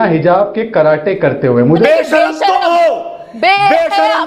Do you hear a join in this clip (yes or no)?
yes